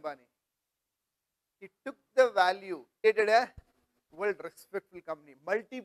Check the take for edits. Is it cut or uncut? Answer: cut